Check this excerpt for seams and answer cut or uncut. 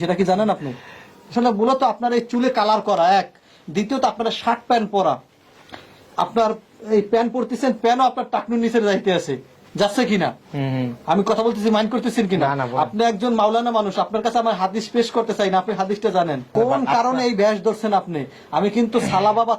cut